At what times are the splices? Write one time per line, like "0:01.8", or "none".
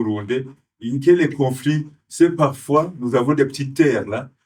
none